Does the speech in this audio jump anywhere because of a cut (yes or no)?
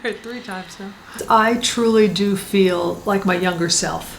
yes